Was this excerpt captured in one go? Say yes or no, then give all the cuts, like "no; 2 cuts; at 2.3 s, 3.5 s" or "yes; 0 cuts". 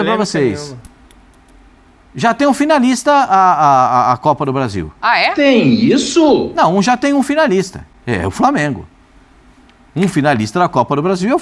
yes; 0 cuts